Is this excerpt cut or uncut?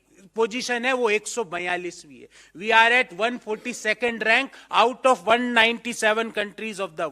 uncut